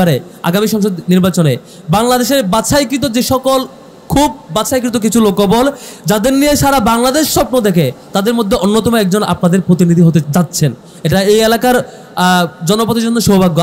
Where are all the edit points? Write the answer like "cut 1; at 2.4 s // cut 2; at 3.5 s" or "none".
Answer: cut 1; at 10.3 s